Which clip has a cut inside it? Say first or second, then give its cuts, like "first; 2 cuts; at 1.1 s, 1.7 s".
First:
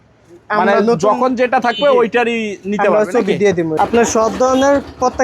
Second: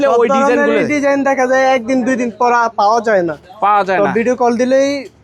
first; 1 cut; at 3.7 s